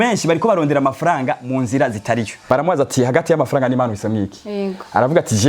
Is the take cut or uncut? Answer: cut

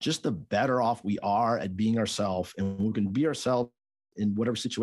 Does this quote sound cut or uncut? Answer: uncut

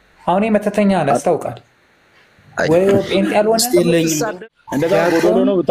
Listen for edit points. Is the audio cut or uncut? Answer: cut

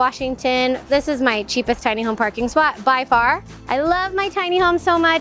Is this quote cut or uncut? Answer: cut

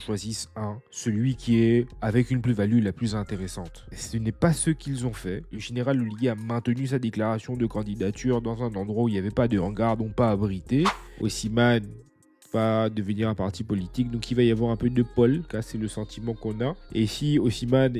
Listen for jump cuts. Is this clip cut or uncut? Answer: cut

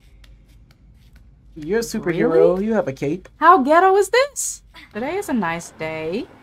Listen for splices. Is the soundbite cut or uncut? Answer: cut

